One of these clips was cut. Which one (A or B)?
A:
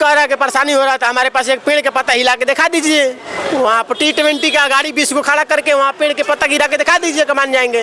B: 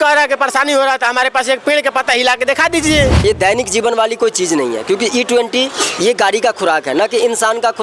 B